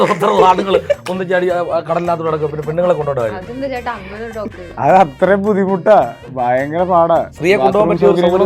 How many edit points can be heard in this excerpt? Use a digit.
2